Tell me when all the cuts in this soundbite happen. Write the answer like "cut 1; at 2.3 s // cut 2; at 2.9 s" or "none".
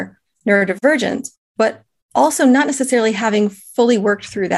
none

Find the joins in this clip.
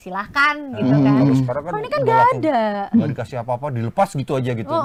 none

